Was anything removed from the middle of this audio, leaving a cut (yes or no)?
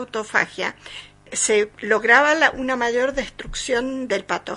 yes